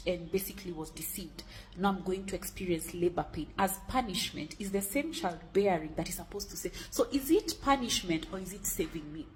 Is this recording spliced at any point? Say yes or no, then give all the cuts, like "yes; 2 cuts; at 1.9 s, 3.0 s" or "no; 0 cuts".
no; 0 cuts